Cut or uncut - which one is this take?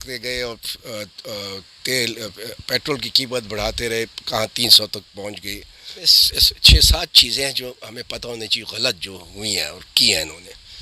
cut